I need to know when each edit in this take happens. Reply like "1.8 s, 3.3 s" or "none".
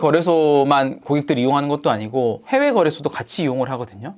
none